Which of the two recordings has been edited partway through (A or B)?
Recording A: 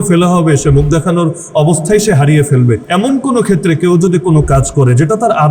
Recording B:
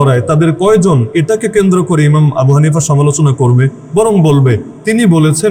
A